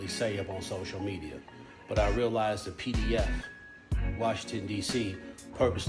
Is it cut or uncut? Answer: uncut